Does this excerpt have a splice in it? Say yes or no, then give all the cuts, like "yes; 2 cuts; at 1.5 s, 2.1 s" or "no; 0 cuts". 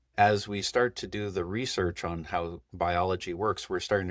no; 0 cuts